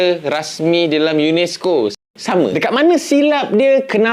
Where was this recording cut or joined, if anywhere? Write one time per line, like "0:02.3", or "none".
0:02.1